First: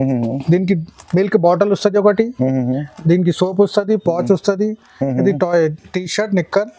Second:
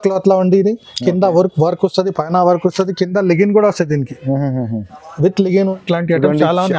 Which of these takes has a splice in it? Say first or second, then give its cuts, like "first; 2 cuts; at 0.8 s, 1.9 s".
second; 1 cut; at 5.7 s